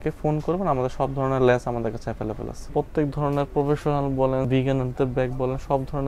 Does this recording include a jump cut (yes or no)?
yes